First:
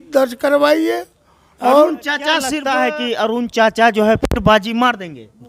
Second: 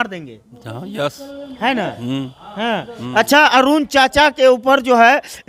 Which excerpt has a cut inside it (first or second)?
first